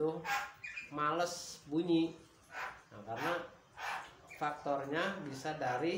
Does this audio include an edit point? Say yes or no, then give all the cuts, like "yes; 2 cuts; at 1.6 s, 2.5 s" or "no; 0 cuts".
no; 0 cuts